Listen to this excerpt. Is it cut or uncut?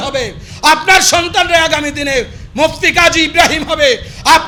uncut